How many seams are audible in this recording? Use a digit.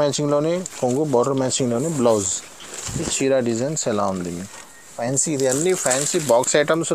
1